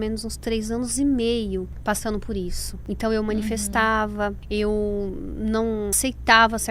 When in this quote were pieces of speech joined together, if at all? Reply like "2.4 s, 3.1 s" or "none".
1.7 s, 2.7 s, 4.4 s, 6.0 s